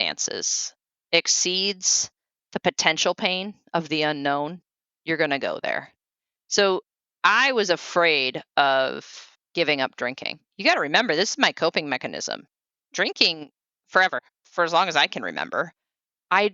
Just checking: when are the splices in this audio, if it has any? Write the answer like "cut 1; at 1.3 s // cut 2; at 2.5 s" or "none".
cut 1; at 14.3 s